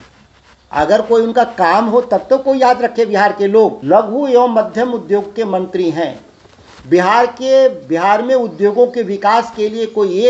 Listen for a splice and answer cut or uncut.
cut